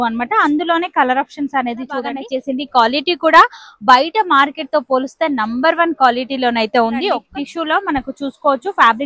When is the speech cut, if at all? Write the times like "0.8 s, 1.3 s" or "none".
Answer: 2.2 s, 7.2 s